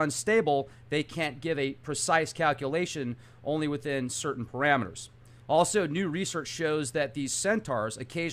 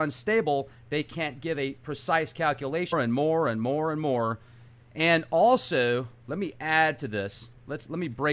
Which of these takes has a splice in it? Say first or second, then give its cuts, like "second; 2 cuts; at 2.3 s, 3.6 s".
first; 1 cut; at 2.9 s